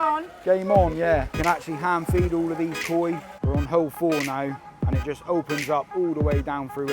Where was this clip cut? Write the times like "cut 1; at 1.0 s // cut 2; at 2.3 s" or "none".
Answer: cut 1; at 1.3 s // cut 2; at 3.3 s